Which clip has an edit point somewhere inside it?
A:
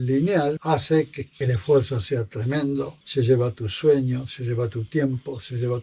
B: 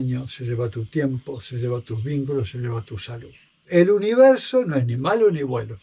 B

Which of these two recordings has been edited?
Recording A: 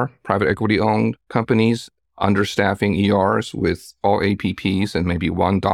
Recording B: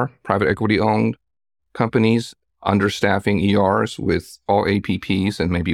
A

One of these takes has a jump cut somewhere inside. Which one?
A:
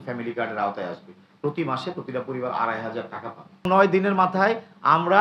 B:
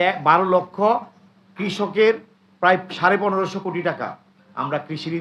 A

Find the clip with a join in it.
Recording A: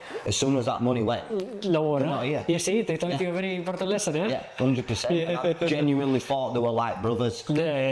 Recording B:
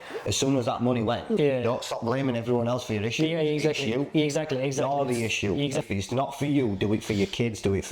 B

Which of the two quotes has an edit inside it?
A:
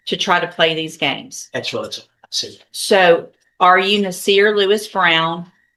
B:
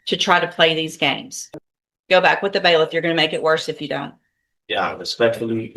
B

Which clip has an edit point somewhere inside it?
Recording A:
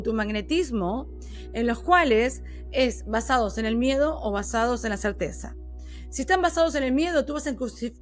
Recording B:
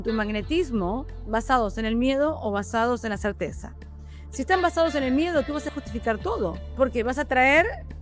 B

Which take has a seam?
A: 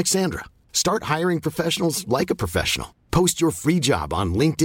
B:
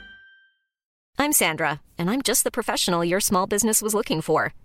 B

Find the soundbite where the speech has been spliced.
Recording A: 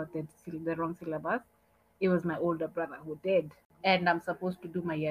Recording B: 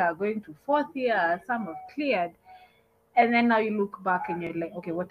A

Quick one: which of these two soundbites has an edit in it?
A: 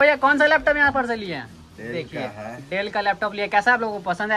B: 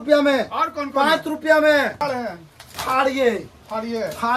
B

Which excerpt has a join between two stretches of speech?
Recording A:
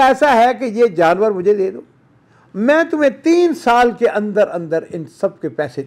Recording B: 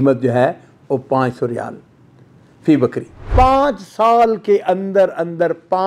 B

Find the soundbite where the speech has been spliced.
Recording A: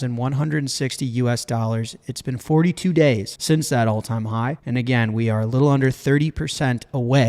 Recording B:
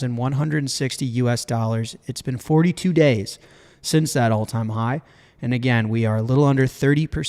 A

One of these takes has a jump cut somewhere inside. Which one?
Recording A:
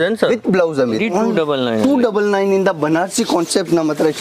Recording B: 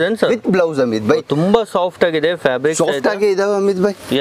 A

